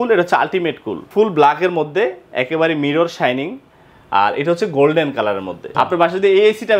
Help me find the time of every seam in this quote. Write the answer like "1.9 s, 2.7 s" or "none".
1.0 s, 5.7 s